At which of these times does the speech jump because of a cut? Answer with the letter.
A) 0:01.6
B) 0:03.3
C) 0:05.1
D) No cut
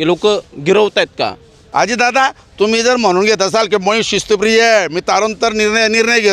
A